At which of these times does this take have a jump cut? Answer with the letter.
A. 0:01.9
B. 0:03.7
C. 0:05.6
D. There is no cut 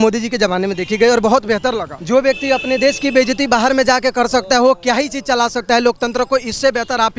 A